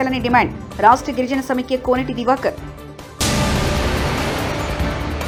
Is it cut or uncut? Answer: uncut